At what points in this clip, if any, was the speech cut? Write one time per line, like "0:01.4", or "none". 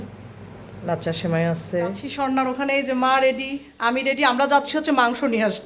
0:02.1